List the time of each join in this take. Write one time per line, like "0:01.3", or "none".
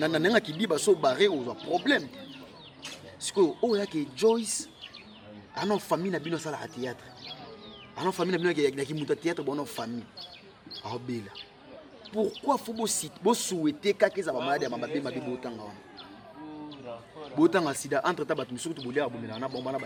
none